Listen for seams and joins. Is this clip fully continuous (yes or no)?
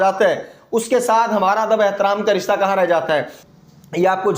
no